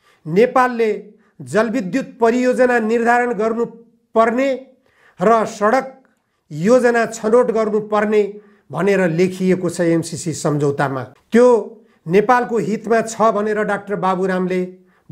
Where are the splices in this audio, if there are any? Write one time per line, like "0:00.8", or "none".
0:11.1